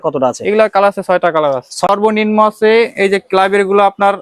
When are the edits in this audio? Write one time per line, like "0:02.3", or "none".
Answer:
0:01.9

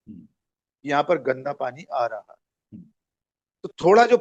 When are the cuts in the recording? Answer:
none

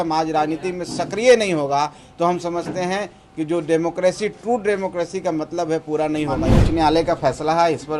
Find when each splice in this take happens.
0:06.6

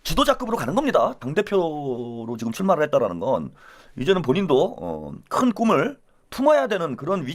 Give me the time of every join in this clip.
none

